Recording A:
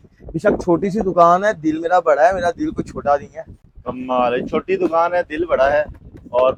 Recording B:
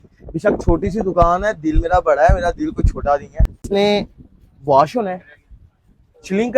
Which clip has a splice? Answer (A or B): B